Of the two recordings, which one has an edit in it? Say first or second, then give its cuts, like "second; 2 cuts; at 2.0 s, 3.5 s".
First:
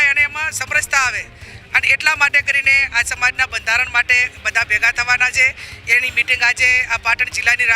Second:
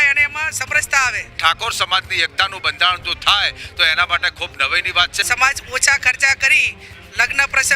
second; 2 cuts; at 1.3 s, 5.1 s